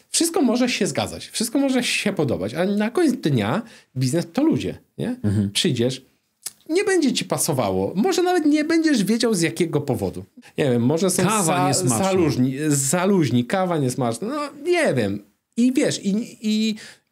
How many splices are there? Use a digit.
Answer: 1